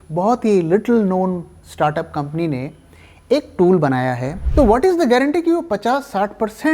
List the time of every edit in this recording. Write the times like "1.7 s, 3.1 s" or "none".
4.4 s